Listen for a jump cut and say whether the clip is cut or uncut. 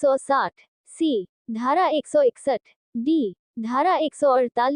uncut